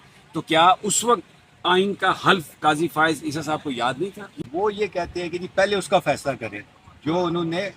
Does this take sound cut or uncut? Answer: cut